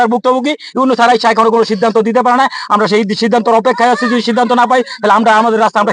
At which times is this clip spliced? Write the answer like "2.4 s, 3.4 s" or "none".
none